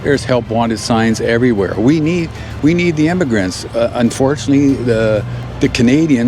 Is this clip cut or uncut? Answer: cut